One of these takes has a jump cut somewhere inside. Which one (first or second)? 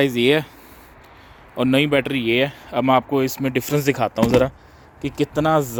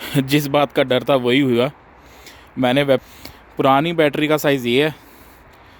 second